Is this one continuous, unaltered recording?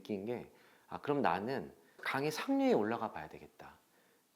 no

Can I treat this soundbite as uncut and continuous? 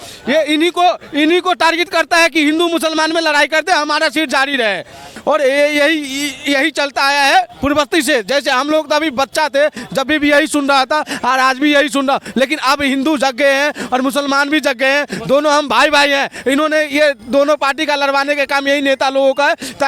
no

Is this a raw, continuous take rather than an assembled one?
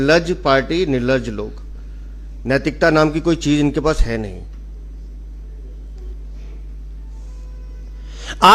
no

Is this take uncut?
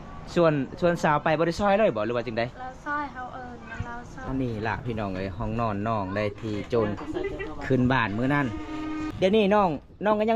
no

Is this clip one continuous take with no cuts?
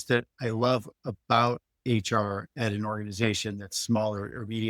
yes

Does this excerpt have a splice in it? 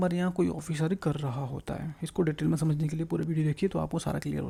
no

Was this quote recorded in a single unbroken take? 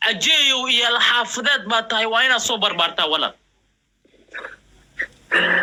yes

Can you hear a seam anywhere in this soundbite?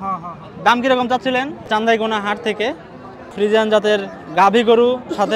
yes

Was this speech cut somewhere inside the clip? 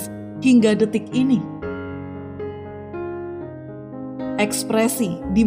yes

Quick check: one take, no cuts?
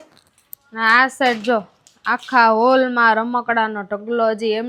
yes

